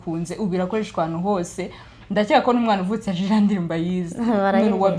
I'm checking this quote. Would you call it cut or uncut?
uncut